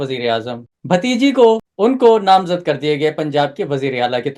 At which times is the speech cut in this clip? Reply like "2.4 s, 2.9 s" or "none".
1.7 s